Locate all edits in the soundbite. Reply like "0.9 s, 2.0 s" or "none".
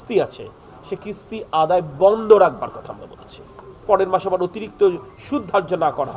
3.7 s